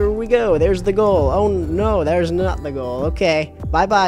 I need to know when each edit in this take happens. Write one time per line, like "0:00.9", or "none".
none